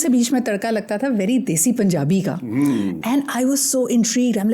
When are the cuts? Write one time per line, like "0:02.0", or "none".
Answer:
none